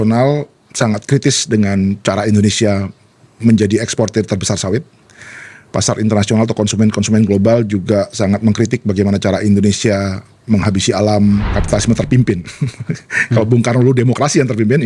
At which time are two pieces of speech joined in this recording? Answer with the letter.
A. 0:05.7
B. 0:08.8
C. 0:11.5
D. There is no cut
C